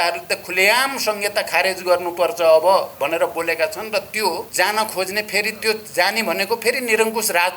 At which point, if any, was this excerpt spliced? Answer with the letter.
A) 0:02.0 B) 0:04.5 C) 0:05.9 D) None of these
B